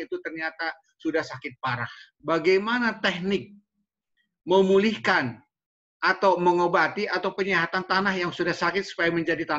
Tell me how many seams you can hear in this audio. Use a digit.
1